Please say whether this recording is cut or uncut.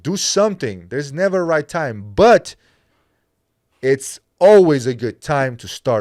uncut